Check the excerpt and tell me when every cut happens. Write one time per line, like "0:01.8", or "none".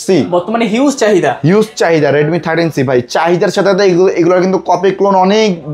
none